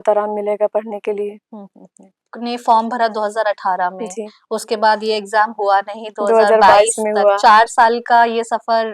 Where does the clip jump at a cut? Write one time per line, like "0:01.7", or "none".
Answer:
0:02.2